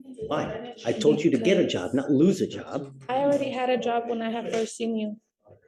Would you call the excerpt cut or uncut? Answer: uncut